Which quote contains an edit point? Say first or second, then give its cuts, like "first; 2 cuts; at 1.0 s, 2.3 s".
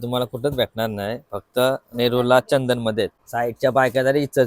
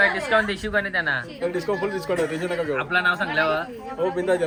first; 1 cut; at 3.2 s